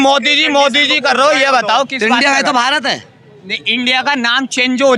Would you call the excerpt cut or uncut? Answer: uncut